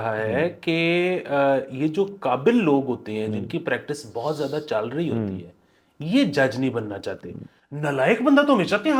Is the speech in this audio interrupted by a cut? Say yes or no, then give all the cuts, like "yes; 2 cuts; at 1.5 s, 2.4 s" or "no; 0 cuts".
no; 0 cuts